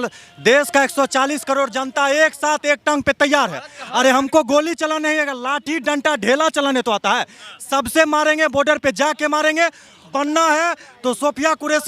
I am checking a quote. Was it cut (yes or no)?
yes